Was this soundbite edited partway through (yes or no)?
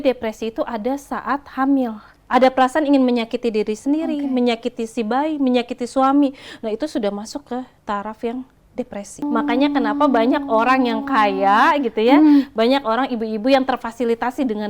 yes